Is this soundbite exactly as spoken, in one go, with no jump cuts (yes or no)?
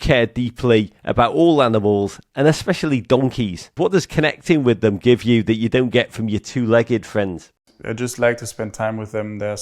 no